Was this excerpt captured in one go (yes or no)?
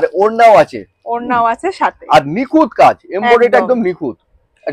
yes